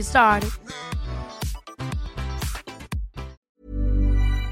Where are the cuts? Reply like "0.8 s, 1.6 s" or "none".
3.5 s